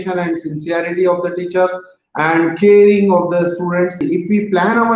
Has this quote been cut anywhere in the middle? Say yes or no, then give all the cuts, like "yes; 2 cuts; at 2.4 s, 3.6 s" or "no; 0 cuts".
yes; 1 cut; at 4.0 s